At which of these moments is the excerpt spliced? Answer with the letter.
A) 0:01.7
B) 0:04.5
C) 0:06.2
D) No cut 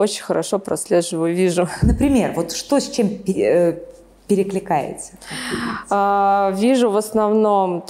D